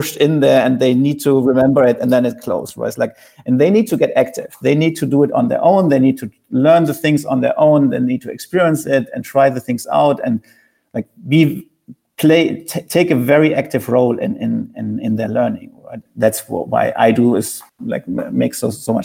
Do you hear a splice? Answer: yes; 2 cuts; at 16.0 s, 17.6 s

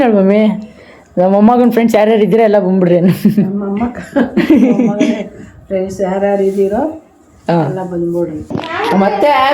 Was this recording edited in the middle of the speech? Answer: yes; 1 cut; at 8.5 s

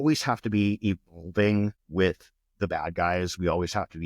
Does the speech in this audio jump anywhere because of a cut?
yes; 1 cut; at 1.8 s

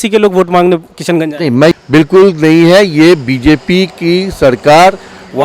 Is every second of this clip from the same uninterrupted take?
no; 1 cut; at 1.7 s

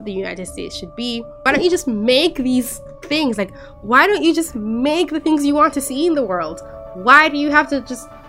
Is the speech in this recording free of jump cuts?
no; 1 cut; at 1.4 s

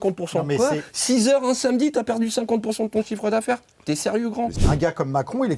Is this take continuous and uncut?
no; 1 cut; at 4.6 s

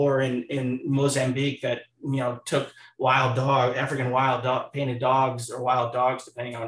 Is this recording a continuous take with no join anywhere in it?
yes; 0 cuts

